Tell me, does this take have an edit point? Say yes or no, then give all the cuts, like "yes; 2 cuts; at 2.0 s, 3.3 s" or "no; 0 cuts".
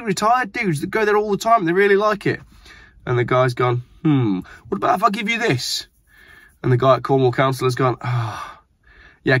no; 0 cuts